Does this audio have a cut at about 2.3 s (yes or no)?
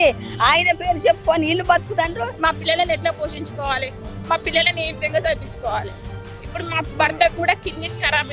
yes